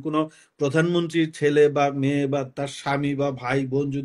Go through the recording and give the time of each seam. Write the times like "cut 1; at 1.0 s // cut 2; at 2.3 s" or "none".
none